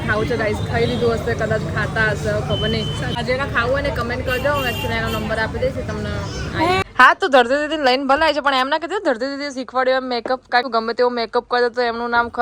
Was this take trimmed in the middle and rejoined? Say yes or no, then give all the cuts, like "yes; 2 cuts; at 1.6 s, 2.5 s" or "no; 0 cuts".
yes; 3 cuts; at 3.1 s, 6.8 s, 10.6 s